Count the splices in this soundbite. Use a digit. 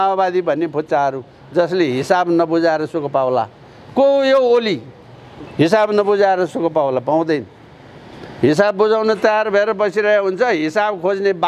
0